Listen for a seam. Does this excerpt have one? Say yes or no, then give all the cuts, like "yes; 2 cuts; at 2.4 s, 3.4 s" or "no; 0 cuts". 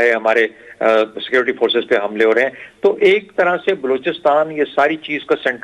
no; 0 cuts